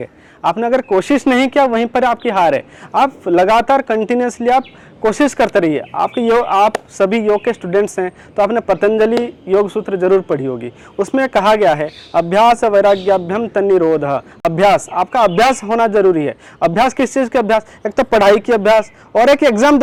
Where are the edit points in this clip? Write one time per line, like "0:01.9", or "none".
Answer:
none